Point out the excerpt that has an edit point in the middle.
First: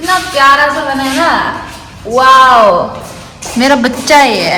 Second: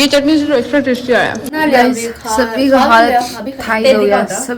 second; 1 cut; at 1.4 s

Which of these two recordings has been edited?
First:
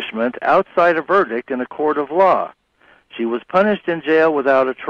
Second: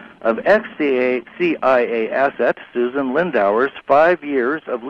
first; 1 cut; at 3.4 s

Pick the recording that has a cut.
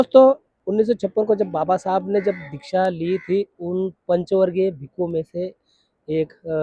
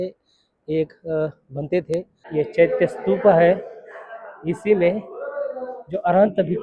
second; 1 cut; at 2.2 s

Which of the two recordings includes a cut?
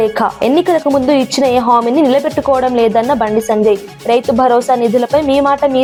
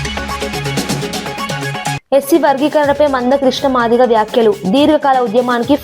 second; 1 cut; at 2.0 s

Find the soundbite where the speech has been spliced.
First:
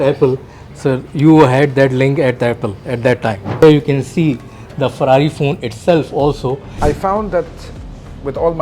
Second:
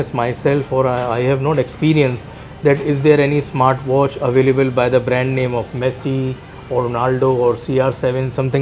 first; 2 cuts; at 3.6 s, 6.7 s

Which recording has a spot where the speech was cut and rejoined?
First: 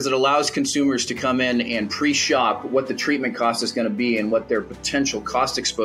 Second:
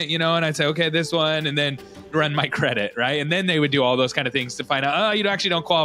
second; 1 cut; at 2.1 s

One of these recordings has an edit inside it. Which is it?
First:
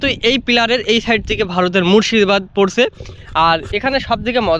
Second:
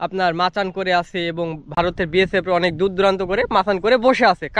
second; 1 cut; at 1.6 s

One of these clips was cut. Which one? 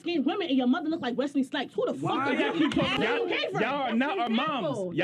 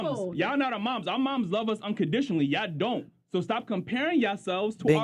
first; 1 cut; at 3.0 s

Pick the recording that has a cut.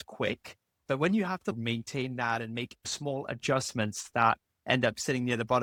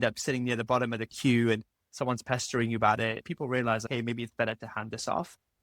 second; 1 cut; at 3.2 s

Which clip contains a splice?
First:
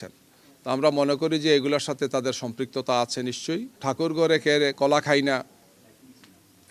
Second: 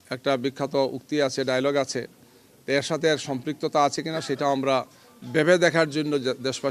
first; 1 cut; at 3.8 s

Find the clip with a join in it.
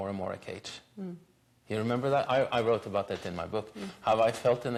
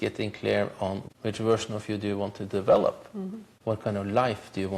second; 2 cuts; at 1.0 s, 3.4 s

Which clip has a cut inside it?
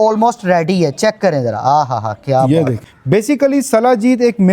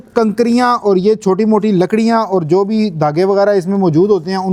first; 1 cut; at 2.9 s

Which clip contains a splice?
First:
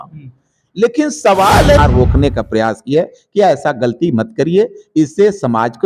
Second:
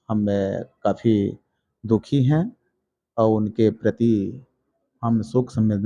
first; 1 cut; at 1.8 s

